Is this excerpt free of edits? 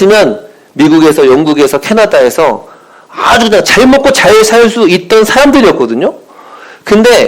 yes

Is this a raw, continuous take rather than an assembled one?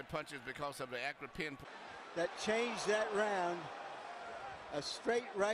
no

